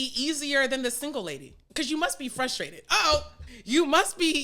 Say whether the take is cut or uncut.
cut